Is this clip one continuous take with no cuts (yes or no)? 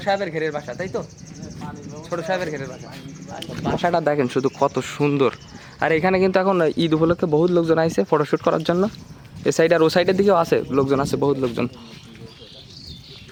yes